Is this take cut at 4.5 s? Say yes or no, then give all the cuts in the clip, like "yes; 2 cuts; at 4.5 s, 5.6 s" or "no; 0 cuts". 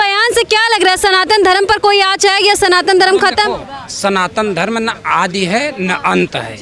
no; 0 cuts